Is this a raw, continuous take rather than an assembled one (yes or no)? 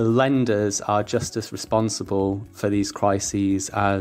yes